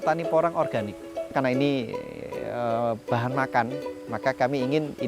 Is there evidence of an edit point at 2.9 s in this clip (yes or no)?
no